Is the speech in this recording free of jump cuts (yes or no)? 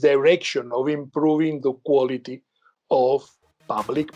yes